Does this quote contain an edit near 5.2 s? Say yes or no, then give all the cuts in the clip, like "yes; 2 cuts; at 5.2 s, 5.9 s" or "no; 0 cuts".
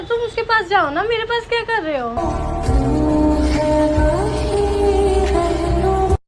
no; 0 cuts